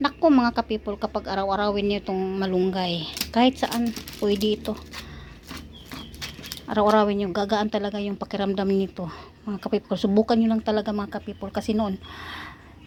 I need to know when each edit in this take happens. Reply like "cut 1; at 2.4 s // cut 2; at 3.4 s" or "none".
none